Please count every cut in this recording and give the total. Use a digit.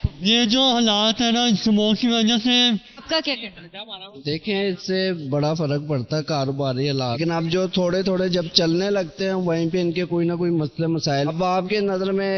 3